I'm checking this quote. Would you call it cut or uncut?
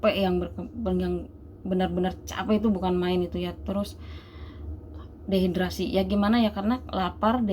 uncut